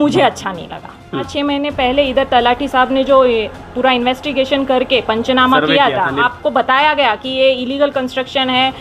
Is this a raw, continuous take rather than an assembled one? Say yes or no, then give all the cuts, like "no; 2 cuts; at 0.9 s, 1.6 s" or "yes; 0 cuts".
no; 2 cuts; at 1.3 s, 6.3 s